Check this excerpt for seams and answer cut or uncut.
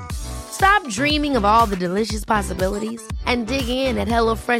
uncut